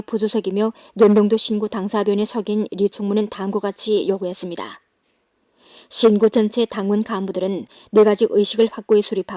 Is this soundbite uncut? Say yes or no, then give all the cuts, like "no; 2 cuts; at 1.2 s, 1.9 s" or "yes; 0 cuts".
no; 1 cut; at 3.3 s